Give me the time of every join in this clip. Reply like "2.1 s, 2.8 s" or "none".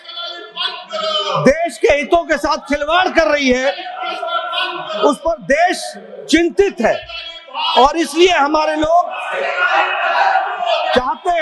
none